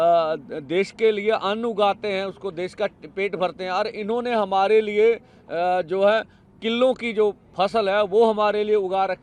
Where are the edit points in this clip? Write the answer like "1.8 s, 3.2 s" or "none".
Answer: none